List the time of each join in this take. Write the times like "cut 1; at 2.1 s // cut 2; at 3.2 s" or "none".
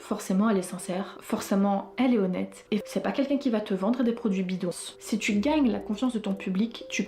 cut 1; at 2.8 s // cut 2; at 4.7 s